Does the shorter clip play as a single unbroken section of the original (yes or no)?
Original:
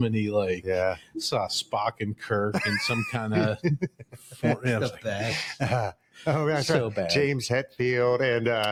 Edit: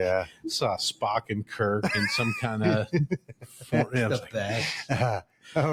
yes